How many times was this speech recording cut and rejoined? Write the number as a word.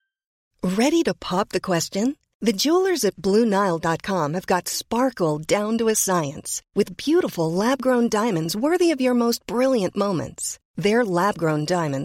zero